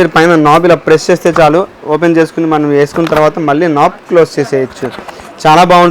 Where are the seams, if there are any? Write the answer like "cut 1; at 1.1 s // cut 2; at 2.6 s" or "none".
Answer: none